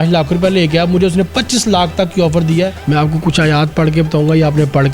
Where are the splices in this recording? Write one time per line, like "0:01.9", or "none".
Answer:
0:02.8